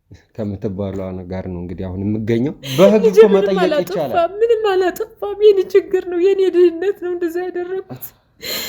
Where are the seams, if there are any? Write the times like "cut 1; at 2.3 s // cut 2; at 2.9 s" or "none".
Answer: cut 1; at 2.6 s

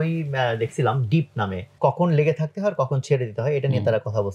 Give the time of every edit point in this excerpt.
cut 1; at 1.7 s

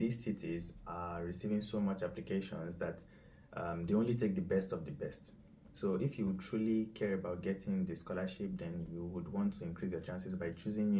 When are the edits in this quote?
none

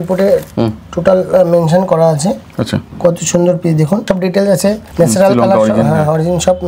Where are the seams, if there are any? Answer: cut 1; at 2.8 s // cut 2; at 4.3 s

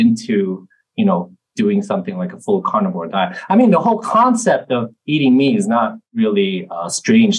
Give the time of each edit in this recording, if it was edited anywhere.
cut 1; at 6.0 s

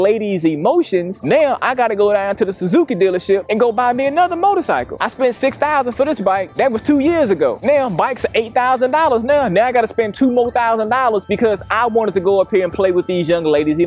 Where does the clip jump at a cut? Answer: none

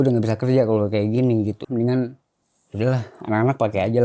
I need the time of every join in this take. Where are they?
cut 1; at 1.6 s

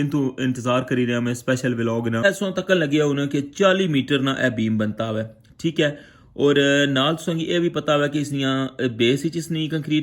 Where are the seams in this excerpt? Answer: cut 1; at 2.2 s

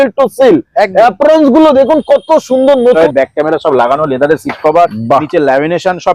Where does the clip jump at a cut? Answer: cut 1; at 3.0 s

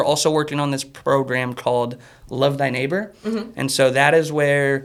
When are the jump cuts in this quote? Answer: none

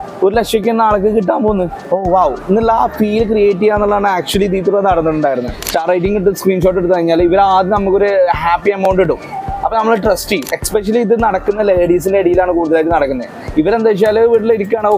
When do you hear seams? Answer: cut 1; at 1.8 s // cut 2; at 5.6 s // cut 3; at 10.6 s

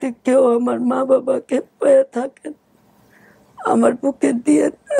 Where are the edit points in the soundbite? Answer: none

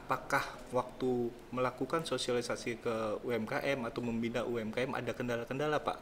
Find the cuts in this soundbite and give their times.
none

